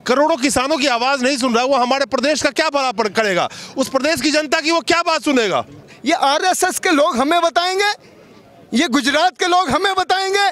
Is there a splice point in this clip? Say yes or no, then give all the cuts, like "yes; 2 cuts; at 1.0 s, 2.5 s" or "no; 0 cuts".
yes; 1 cut; at 5.9 s